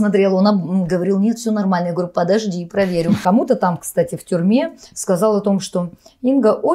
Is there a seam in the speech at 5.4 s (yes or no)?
no